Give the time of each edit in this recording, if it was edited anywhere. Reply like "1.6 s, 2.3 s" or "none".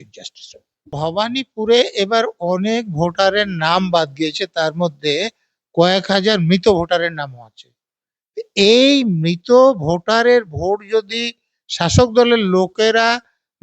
1.0 s